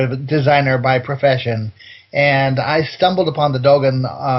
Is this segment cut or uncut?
uncut